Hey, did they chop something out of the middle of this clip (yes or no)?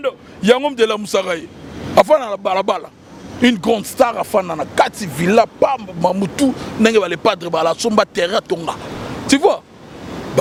no